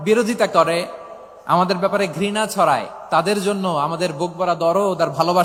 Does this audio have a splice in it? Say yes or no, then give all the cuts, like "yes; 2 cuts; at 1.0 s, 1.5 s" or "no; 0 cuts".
no; 0 cuts